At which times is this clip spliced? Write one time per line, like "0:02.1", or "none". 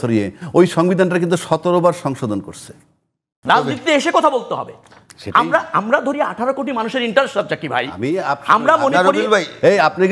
0:03.3